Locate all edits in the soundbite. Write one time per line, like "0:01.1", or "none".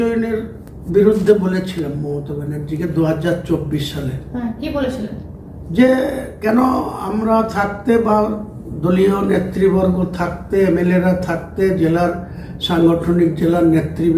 none